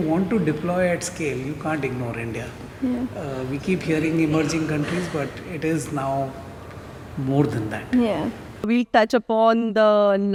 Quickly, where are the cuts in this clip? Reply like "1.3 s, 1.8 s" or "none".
none